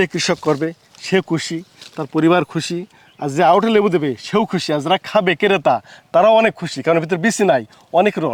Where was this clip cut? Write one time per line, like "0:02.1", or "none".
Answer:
none

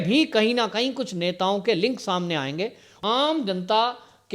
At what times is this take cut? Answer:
0:03.0

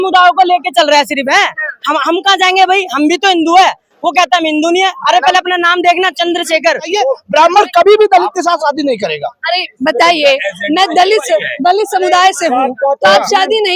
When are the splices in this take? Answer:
0:06.9

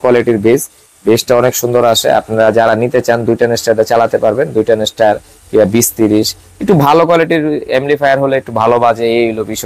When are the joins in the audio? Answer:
none

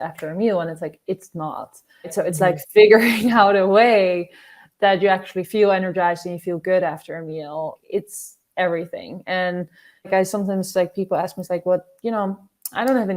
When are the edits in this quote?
0:02.1
0:07.8
0:10.1

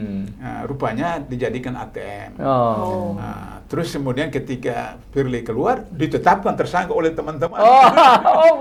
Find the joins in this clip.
none

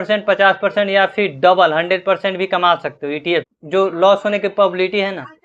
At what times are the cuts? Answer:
0:03.6

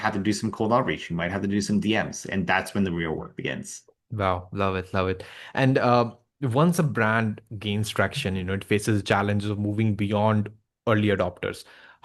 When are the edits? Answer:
none

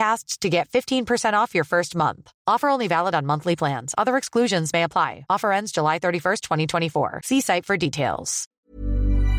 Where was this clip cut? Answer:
0:08.5

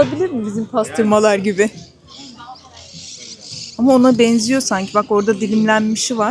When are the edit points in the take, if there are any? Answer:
none

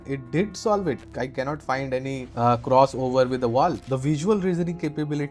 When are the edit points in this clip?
0:01.0
0:02.3
0:03.9

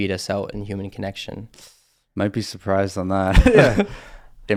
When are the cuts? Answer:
none

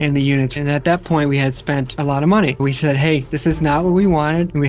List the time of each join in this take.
0:01.9
0:02.6

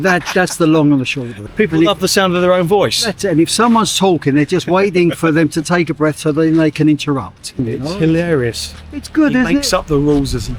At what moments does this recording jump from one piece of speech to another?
0:01.4
0:07.6

